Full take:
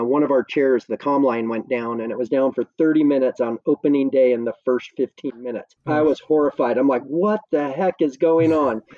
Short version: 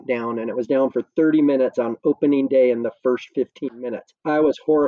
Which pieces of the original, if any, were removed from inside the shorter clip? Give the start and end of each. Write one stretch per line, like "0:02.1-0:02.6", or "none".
none

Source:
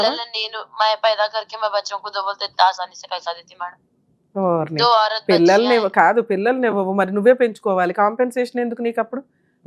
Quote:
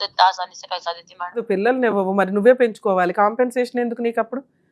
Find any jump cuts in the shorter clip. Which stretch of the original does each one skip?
0:03.8-0:06.2

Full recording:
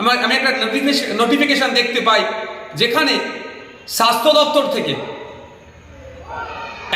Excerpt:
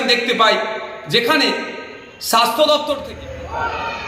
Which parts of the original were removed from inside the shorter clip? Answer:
0:04.7-0:05.8

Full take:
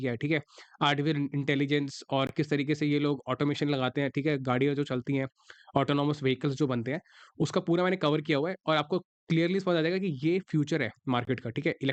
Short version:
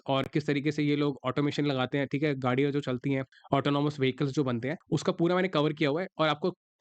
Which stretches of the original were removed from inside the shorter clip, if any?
0:05.4-0:05.6
0:07.0-0:07.2

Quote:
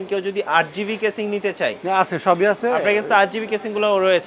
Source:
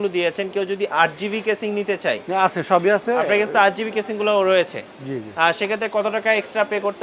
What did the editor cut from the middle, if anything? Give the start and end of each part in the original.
none

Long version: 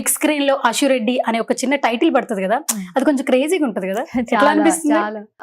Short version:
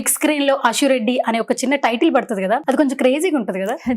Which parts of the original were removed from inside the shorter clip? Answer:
0:02.6-0:02.9

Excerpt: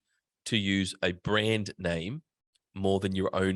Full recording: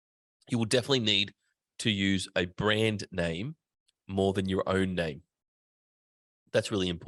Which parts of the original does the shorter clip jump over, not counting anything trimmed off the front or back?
none

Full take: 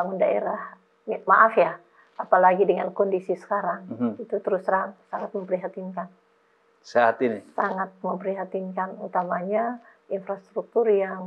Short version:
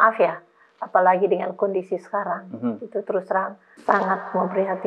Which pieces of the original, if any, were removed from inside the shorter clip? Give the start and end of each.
0:05.1-0:07.5

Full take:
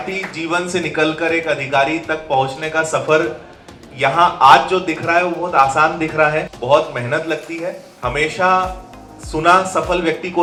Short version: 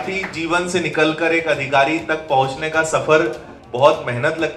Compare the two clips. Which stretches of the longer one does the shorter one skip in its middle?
0:03.6-0:06.5

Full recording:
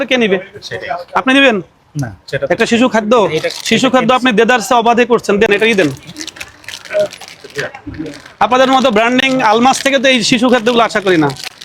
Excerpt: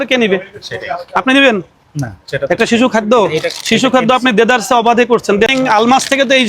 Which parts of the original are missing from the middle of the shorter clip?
0:05.5-0:09.2

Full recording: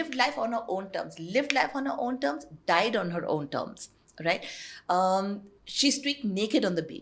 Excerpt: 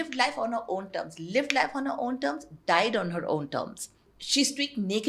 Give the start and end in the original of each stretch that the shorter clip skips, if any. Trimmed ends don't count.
0:04.1-0:05.5

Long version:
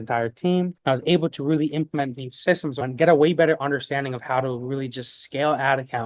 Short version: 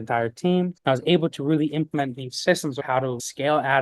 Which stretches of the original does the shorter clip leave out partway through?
0:02.9-0:04.9

